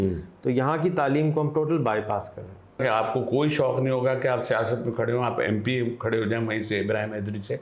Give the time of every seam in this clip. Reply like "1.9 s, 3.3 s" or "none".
2.8 s